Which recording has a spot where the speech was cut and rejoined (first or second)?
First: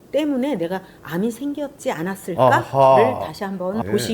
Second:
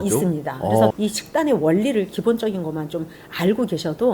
second